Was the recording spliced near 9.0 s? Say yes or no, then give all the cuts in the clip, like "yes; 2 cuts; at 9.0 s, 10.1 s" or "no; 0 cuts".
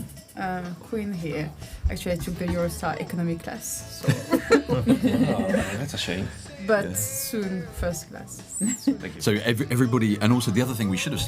yes; 1 cut; at 9.0 s